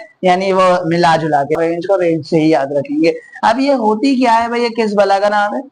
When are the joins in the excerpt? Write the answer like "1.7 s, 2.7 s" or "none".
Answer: 1.6 s